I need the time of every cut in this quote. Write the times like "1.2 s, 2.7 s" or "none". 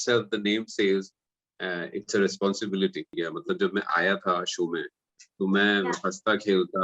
3.1 s